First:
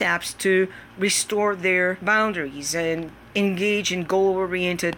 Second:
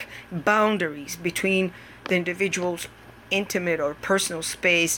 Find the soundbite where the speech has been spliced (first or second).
first